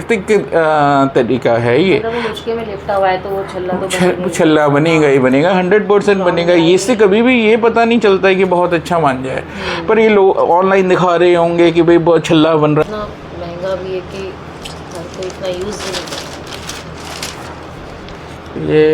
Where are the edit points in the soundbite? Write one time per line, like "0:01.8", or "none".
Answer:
0:12.8